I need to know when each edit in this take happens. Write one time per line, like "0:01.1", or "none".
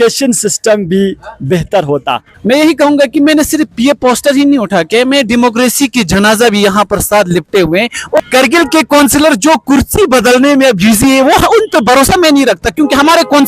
0:02.3
0:08.2